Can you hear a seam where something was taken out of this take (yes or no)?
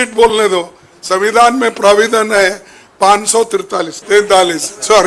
yes